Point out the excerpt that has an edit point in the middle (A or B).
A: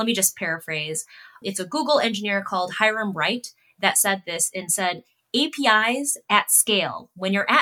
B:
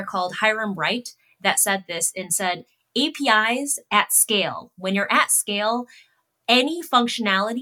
A